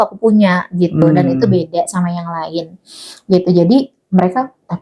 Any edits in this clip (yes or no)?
no